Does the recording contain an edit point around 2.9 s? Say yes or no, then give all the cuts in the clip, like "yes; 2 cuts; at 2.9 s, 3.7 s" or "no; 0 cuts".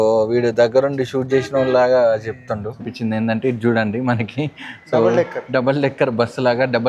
yes; 1 cut; at 2.9 s